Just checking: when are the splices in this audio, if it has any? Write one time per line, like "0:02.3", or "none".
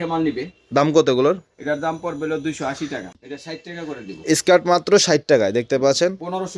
0:03.0